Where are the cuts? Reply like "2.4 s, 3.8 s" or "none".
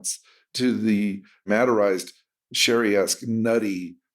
1.4 s